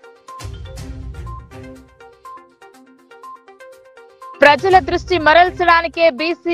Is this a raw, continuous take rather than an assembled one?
yes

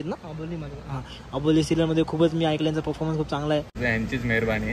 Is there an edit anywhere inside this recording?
yes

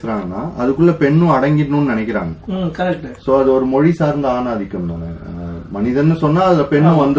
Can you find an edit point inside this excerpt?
no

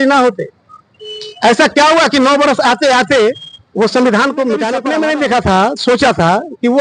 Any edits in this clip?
yes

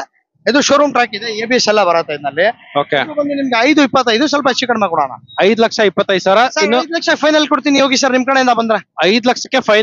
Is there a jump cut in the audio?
no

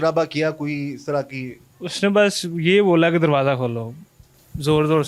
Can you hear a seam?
no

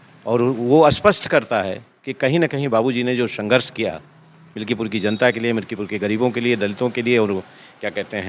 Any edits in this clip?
no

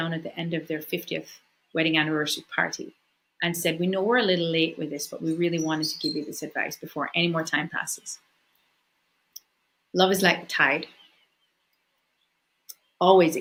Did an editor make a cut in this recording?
no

